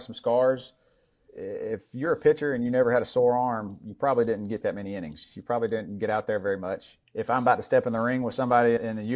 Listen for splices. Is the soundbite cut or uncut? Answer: cut